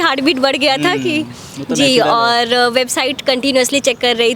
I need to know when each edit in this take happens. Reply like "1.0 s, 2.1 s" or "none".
none